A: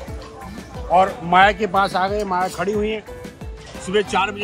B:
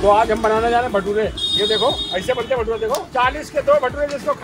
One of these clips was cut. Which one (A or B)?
B